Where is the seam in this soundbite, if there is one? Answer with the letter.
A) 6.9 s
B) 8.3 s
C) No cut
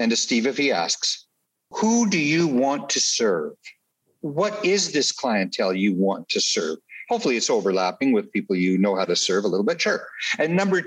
C